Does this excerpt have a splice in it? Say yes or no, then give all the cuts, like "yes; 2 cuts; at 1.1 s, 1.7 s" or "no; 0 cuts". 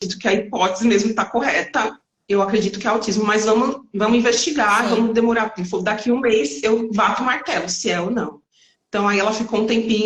no; 0 cuts